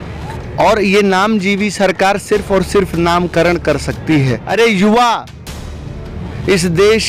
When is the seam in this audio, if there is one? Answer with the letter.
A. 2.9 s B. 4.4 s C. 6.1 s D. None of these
B